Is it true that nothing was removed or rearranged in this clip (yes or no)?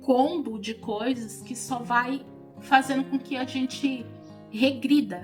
yes